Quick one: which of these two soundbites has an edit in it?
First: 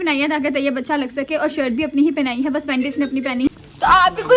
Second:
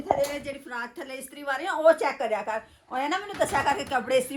first; 1 cut; at 3.5 s

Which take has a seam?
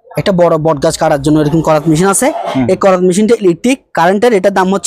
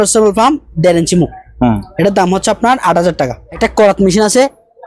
second; 1 cut; at 3.5 s

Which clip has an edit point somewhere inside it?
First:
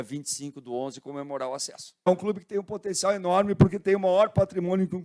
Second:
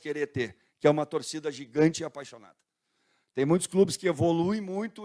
first; 1 cut; at 2.1 s

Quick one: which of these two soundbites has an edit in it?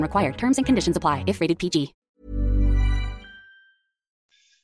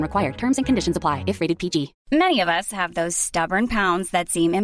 second; 1 cut; at 2.0 s

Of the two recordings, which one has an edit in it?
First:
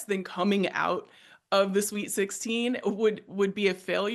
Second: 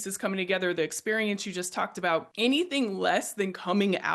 second; 1 cut; at 2.3 s

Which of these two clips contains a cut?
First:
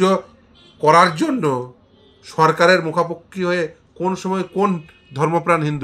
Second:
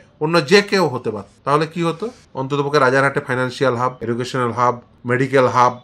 second; 4 cuts; at 1.3 s, 2.2 s, 4.0 s, 4.9 s

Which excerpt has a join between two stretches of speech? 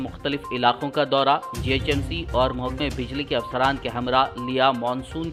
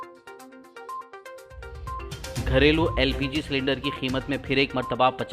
second; 1 cut; at 1.0 s

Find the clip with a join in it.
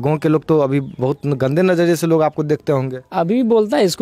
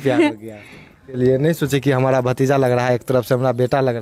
second; 1 cut; at 1.1 s

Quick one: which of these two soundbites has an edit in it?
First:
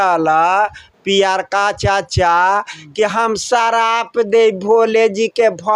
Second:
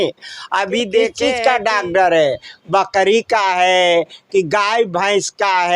second; 1 cut; at 1.2 s

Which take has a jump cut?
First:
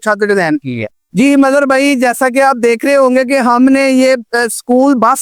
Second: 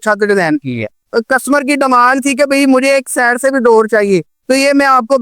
second; 1 cut; at 1.0 s

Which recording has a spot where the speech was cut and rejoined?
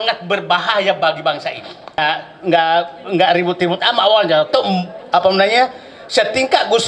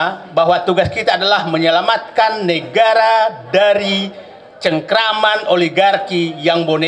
first; 1 cut; at 2.0 s

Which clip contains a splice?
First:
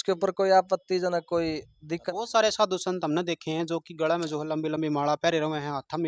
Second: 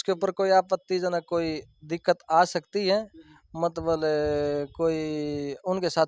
first; 1 cut; at 2.0 s

